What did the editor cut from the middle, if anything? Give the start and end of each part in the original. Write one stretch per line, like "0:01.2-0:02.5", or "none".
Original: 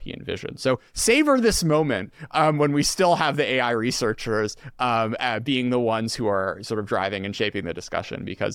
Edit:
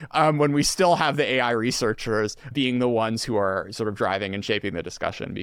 0:04.7-0:05.4